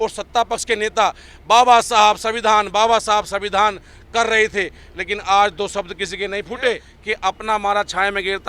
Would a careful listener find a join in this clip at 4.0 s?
no; 1 cut; at 6.9 s

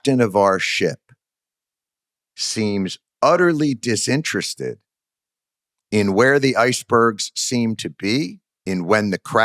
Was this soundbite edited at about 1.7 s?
no; 1 cut; at 8.5 s

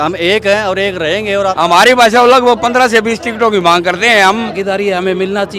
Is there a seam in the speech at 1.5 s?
yes; 2 cuts; at 1.5 s, 4.6 s

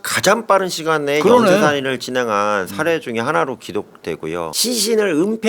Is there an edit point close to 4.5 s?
yes; 1 cut; at 4.5 s

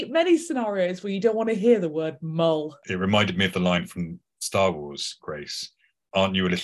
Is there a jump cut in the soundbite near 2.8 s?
yes; 1 cut; at 2.8 s

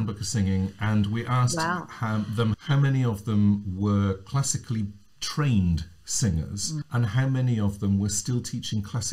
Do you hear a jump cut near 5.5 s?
no; 2 cuts; at 2.6 s, 6.8 s

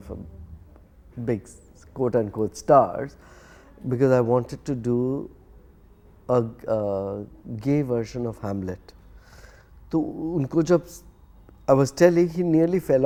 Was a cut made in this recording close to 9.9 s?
no; 0 cuts

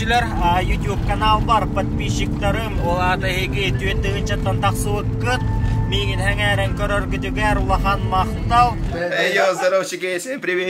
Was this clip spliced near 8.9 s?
yes; 1 cut; at 8.9 s

